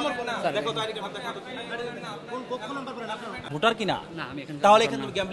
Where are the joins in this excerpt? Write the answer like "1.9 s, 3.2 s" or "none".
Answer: 3.5 s

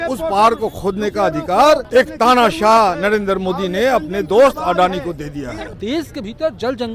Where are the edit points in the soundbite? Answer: 1.9 s, 5.7 s

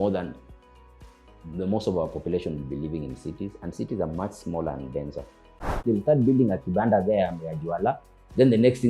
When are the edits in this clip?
5.7 s

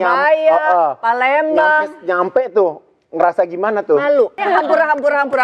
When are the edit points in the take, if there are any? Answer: 4.4 s

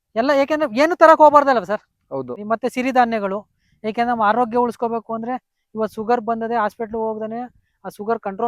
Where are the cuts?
2.3 s

